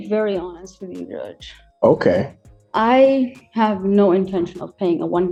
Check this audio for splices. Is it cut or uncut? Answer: uncut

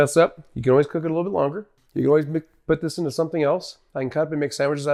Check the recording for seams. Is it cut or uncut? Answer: uncut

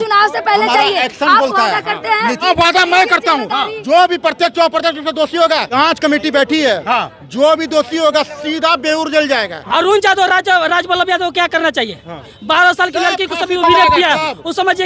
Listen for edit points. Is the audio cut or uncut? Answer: cut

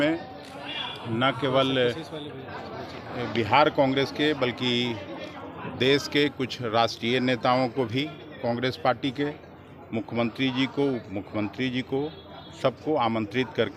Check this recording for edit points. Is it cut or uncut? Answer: uncut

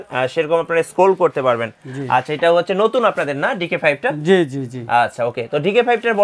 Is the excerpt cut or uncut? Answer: uncut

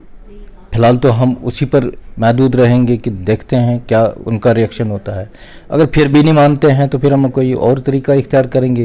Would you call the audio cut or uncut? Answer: uncut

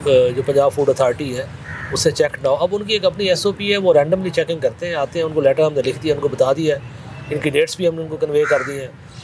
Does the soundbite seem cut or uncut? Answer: uncut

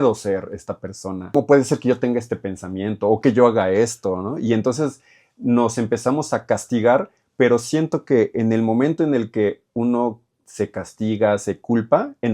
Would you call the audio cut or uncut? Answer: cut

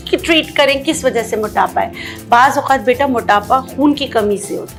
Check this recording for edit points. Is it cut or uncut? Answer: uncut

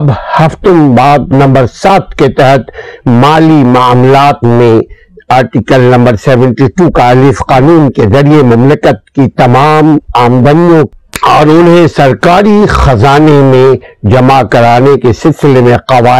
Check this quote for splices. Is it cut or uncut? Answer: cut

